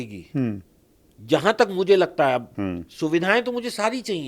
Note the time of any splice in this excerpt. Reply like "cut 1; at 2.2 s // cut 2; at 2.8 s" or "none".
cut 1; at 2.5 s